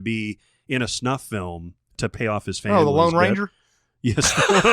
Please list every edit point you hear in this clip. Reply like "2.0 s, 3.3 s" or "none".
2.0 s